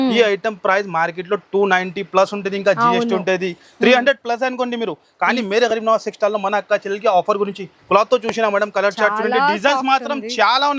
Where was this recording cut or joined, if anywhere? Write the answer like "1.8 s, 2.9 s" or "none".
none

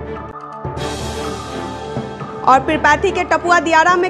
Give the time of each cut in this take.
2.3 s

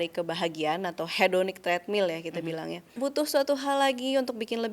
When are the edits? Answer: 2.9 s

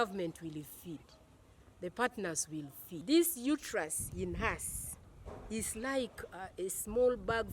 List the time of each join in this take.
3.0 s

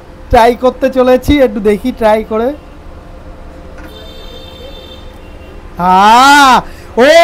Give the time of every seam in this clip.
none

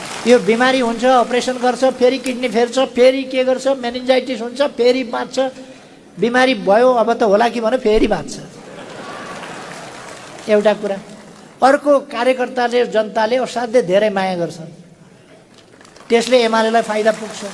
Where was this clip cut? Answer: none

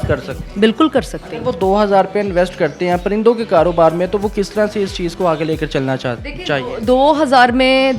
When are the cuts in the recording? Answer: none

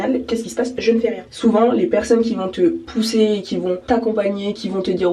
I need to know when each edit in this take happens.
1.3 s, 2.8 s, 3.8 s

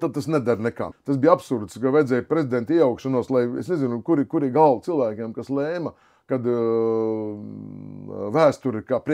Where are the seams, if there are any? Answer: 1.0 s

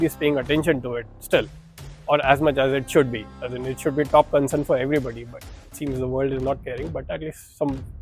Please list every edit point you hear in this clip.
none

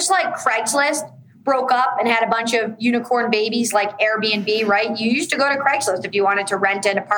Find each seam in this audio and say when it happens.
none

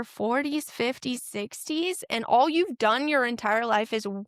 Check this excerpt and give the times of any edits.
none

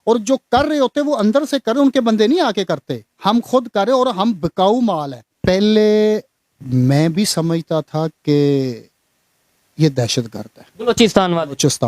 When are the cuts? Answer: 5.2 s

